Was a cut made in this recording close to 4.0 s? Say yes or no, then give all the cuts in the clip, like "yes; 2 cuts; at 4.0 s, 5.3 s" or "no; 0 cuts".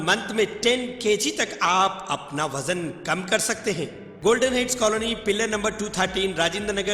yes; 1 cut; at 4.0 s